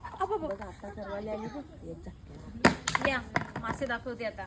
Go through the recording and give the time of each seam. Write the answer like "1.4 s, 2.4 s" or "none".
2.1 s